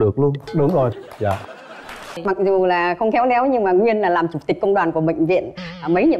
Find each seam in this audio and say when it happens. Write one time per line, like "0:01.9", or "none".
0:02.2